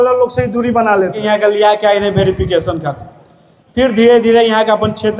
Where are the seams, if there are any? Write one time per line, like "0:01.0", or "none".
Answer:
0:01.2